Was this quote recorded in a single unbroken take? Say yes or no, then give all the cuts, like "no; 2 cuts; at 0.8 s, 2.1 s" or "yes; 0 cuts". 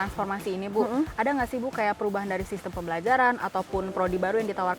yes; 0 cuts